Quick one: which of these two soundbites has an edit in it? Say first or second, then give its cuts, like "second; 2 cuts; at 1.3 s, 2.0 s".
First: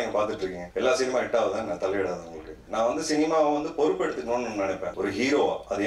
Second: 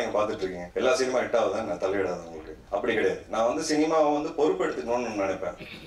first; 2 cuts; at 2.6 s, 4.9 s